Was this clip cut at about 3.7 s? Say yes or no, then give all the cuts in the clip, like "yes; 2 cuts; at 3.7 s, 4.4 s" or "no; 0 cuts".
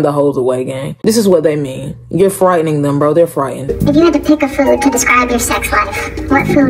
yes; 1 cut; at 3.7 s